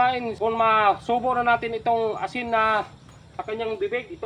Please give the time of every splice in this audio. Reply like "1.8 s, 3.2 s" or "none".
none